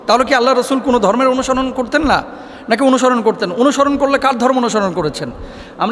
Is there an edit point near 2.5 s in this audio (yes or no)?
no